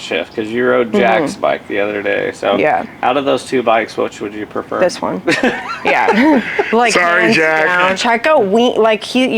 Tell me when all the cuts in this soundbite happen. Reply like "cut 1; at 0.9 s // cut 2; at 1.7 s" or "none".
cut 1; at 8.0 s

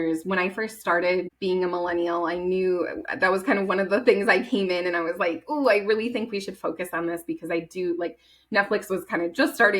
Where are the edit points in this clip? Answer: cut 1; at 1.3 s

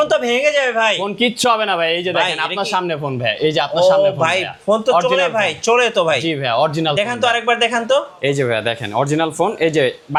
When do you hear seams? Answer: none

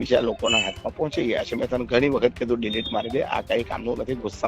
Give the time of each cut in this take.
none

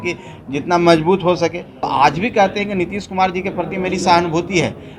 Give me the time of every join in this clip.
cut 1; at 1.9 s

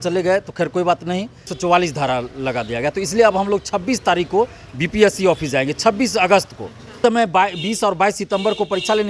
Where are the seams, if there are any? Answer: cut 1; at 1.5 s // cut 2; at 7.0 s

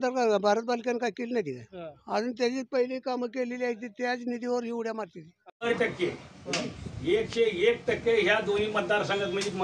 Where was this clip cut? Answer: cut 1; at 5.6 s

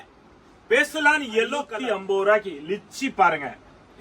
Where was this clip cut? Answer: cut 1; at 1.6 s

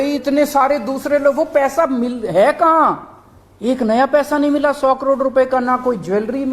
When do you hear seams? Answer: none

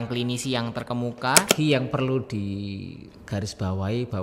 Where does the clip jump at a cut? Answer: cut 1; at 1.5 s

